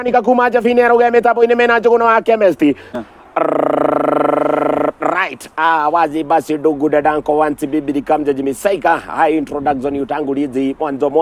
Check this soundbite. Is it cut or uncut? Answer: cut